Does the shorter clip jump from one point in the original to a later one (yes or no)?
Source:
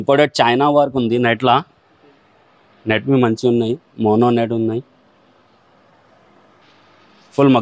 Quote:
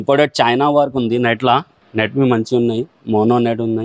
yes